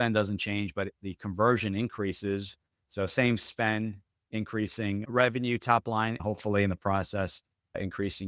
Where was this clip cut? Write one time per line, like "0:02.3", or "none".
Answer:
0:06.2